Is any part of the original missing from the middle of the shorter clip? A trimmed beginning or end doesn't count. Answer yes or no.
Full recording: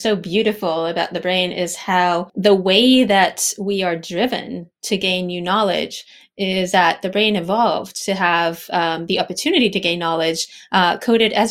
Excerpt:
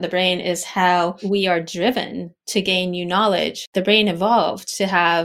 yes